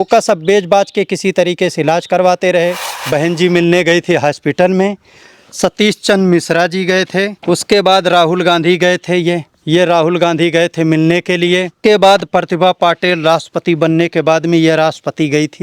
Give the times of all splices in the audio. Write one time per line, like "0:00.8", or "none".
0:02.9
0:07.4
0:09.5
0:11.8